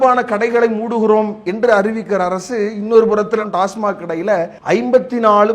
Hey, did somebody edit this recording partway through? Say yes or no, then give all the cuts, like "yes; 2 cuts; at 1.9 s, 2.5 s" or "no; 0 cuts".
yes; 1 cut; at 4.6 s